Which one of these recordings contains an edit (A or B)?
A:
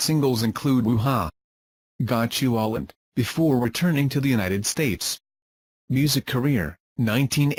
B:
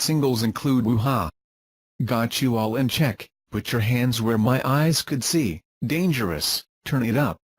B